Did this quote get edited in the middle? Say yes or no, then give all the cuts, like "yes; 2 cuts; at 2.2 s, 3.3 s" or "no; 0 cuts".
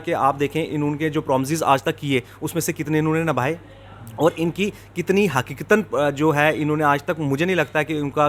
no; 0 cuts